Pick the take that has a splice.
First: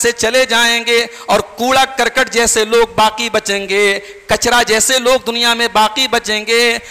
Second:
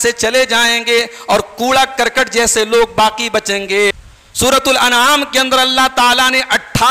second; 1 cut; at 4.1 s

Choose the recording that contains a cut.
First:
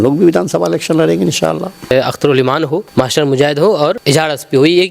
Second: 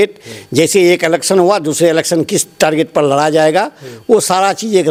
first; 3 cuts; at 1.9 s, 2.9 s, 4.0 s

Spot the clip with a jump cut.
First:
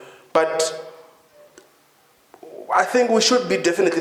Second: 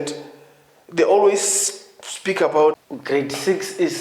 second; 1 cut; at 2.8 s

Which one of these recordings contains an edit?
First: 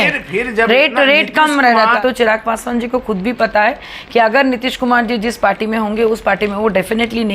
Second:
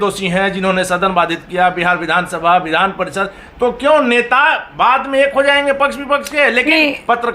first; 1 cut; at 2.0 s

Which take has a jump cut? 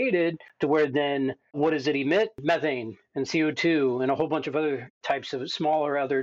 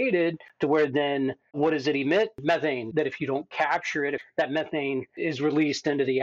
second; 2 cuts; at 2.9 s, 4.2 s

